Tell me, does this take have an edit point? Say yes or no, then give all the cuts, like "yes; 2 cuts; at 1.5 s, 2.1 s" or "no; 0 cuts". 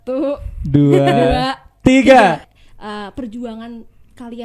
yes; 1 cut; at 2.5 s